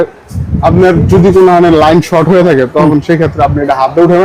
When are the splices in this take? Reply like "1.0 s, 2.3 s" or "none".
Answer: none

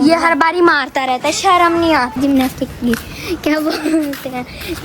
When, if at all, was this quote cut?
2.1 s

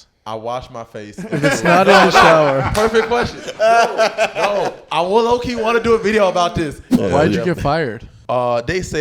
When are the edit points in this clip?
6.8 s, 8.1 s

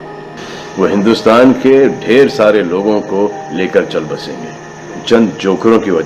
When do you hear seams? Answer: 5.0 s

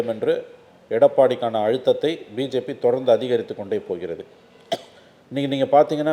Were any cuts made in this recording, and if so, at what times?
none

